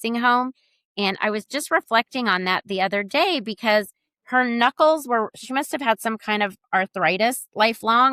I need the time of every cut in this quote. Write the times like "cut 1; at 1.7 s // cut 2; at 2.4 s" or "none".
none